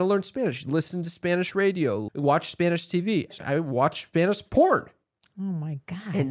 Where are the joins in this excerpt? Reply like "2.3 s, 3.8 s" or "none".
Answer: 2.0 s, 3.3 s